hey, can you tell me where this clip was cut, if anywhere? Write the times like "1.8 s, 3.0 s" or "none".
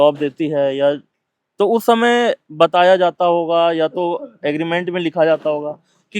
none